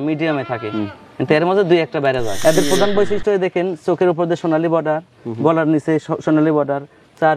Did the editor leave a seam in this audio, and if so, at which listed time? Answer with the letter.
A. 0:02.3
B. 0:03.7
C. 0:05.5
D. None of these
A